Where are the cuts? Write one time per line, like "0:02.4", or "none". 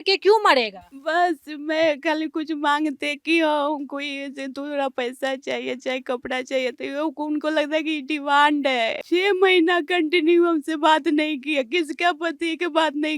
0:09.0